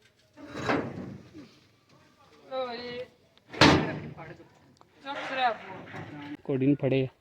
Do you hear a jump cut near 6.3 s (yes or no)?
yes